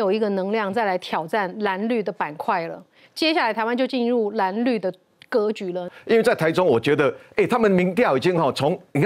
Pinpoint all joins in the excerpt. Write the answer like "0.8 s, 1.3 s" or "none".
5.9 s